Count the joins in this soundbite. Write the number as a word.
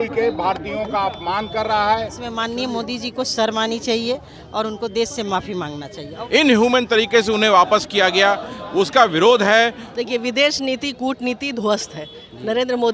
three